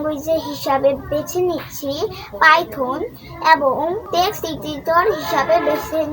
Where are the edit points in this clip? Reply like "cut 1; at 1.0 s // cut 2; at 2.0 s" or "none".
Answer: cut 1; at 4.0 s